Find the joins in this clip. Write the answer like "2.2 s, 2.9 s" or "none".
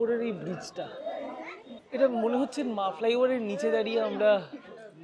none